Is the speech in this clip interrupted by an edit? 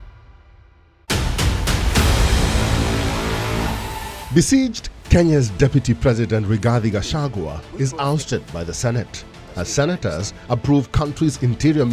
yes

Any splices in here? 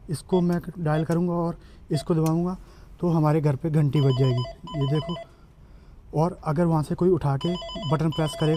no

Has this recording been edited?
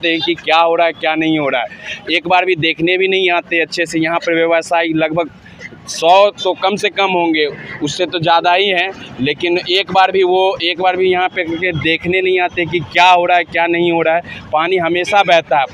no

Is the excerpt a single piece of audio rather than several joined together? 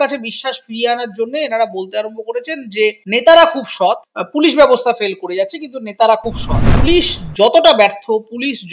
no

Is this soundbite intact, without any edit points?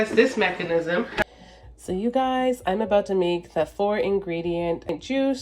no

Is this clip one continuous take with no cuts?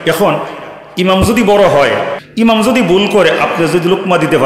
no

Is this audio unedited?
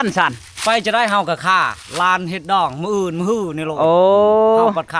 yes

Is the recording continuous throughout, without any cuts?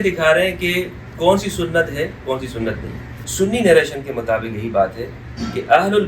no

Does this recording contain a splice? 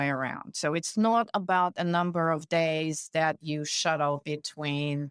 no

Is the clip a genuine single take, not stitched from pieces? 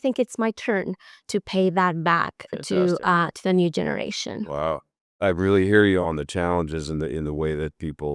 no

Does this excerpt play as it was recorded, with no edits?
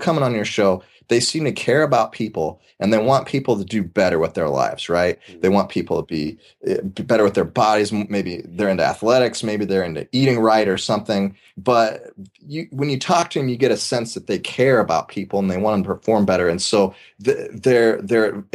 yes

